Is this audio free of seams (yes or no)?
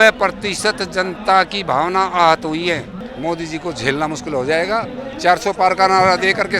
no